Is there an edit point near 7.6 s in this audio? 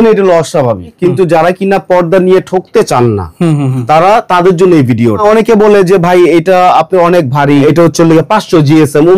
yes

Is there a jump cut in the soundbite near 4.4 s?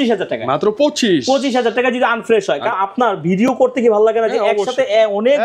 no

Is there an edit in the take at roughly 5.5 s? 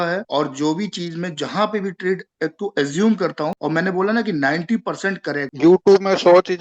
yes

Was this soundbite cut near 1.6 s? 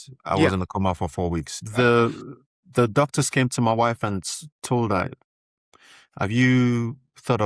yes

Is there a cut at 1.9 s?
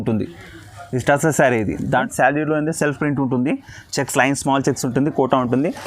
yes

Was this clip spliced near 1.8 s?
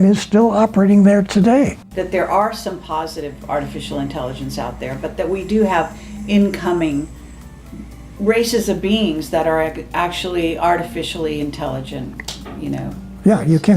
yes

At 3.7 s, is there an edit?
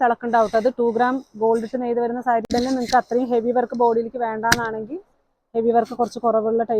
no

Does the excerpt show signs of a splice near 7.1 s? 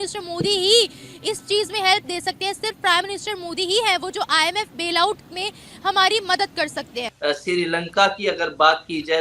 yes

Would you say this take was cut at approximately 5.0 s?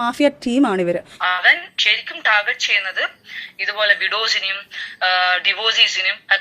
no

